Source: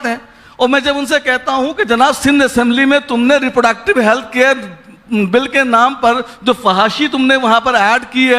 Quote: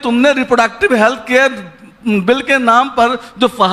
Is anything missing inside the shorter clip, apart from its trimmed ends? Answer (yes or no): no